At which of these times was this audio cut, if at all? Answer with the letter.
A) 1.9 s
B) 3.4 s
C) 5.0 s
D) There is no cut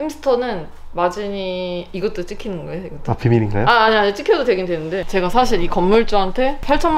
C